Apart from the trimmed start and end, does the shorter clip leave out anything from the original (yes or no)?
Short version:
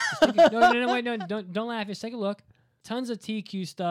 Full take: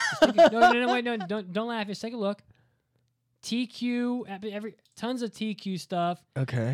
yes